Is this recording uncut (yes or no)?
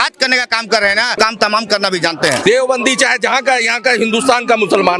no